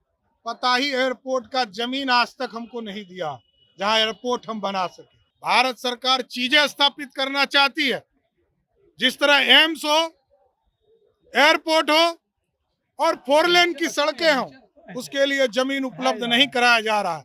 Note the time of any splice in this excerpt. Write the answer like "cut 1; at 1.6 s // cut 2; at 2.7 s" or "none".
cut 1; at 4.7 s